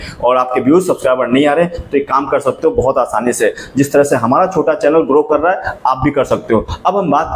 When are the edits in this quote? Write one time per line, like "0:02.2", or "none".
none